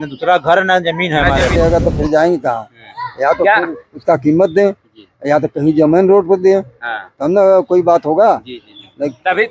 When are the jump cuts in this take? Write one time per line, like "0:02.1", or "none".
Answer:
0:01.6